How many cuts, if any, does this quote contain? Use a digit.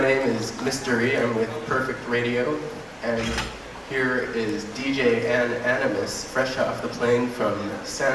1